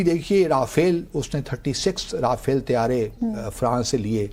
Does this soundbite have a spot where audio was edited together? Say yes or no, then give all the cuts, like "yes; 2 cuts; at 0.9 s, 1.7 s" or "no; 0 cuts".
no; 0 cuts